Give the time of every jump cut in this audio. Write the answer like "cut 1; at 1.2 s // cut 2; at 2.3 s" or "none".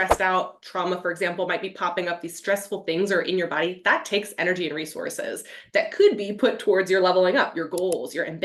none